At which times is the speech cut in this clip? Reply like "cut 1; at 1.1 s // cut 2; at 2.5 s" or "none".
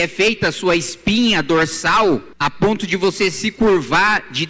cut 1; at 2.3 s